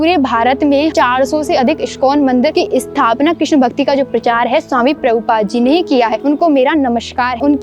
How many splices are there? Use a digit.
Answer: 3